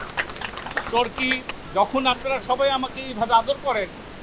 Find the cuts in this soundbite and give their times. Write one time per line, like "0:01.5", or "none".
0:01.5